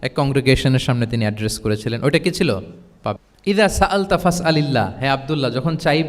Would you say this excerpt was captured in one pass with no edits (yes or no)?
no